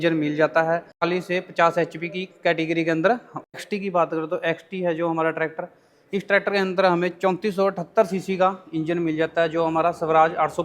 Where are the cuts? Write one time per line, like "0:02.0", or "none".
0:01.0
0:03.9